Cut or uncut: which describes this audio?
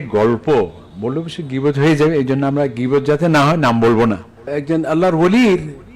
cut